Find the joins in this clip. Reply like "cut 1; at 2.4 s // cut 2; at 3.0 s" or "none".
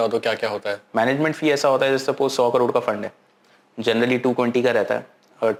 none